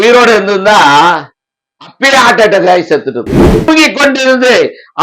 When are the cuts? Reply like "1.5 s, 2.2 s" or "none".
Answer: 3.7 s